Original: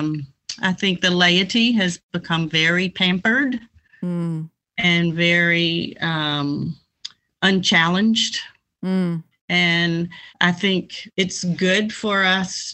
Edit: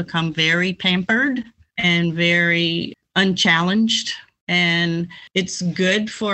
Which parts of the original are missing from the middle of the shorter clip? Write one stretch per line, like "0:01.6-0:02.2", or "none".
0:03.8-0:04.6
0:06.0-0:07.2
0:08.6-0:09.3
0:10.2-0:11.0